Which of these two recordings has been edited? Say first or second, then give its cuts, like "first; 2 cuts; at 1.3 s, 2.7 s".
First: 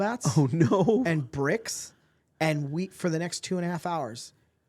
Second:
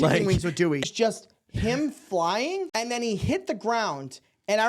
second; 2 cuts; at 0.8 s, 2.7 s